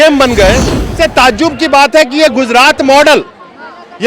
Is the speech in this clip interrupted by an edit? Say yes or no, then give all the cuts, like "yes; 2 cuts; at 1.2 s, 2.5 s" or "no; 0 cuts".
yes; 1 cut; at 0.9 s